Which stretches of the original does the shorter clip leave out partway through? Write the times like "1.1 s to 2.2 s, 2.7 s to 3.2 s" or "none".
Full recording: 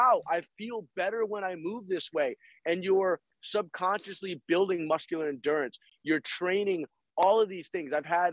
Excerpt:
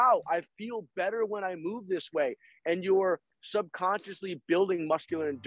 none